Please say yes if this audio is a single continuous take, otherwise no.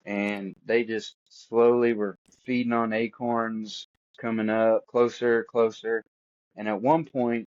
no